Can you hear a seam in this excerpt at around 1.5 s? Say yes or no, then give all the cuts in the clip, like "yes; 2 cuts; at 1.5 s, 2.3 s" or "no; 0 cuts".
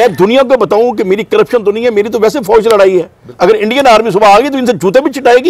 no; 1 cut; at 3.2 s